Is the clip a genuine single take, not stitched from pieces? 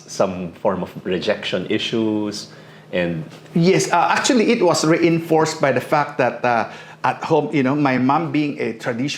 yes; 0 cuts

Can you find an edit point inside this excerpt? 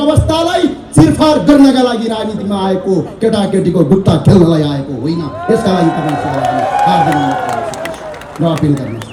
no; 0 cuts

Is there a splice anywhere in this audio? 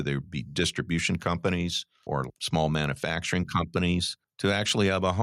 yes; 2 cuts; at 2.3 s, 4.2 s

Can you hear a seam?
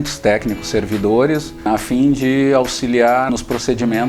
yes; 2 cuts; at 1.5 s, 3.3 s

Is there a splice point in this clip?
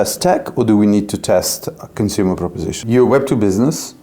yes; 1 cut; at 2.7 s

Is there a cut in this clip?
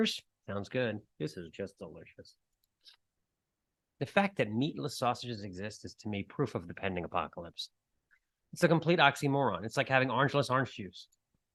no; 0 cuts

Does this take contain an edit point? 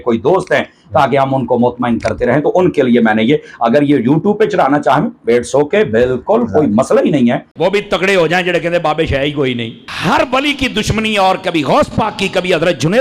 yes; 1 cut; at 7.5 s

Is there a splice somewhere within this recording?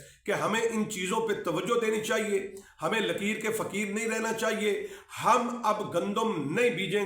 no; 0 cuts

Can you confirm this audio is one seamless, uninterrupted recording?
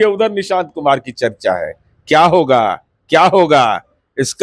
yes; 0 cuts

